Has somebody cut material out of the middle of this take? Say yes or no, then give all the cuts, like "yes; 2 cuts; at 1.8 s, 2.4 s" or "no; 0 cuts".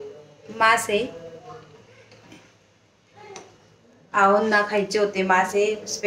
no; 0 cuts